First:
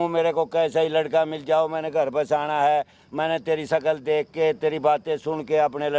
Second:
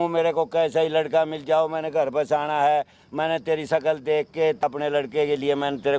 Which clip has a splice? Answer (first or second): second